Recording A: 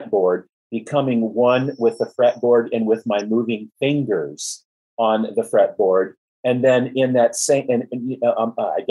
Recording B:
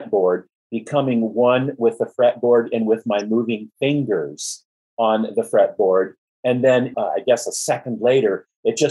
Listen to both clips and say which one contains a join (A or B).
B